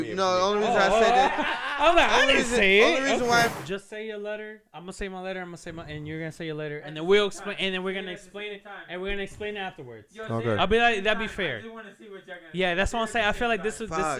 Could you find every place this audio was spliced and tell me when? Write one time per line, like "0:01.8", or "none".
0:03.5

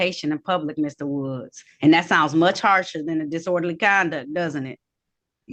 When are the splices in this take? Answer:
none

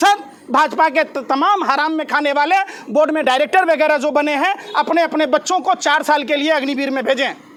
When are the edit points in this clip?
none

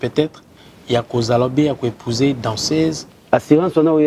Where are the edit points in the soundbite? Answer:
0:03.1

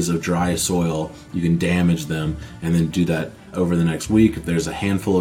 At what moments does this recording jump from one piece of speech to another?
0:03.5

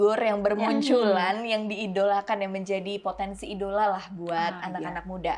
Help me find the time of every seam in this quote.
none

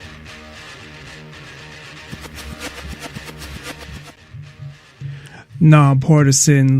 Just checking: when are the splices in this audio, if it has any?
none

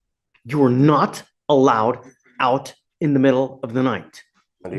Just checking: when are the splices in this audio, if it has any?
none

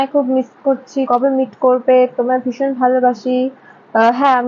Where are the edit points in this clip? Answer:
0:01.1

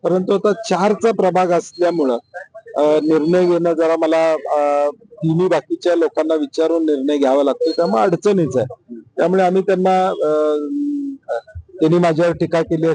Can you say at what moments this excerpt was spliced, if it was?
none

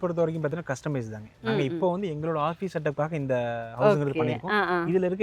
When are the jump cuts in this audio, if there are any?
none

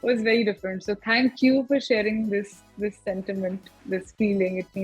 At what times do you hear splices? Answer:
none

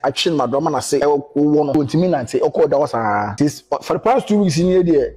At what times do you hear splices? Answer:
0:01.0
0:01.7
0:03.3

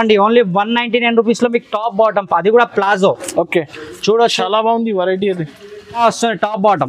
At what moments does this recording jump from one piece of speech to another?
0:06.0

